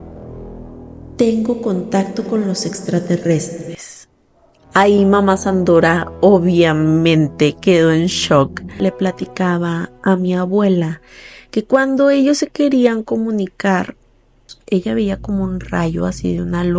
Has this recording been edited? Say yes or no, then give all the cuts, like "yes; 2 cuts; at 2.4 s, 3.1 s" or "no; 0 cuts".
yes; 1 cut; at 8.7 s